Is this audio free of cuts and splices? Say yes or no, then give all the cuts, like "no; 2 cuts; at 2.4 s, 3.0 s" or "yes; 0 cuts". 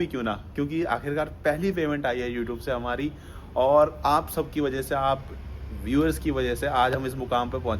yes; 0 cuts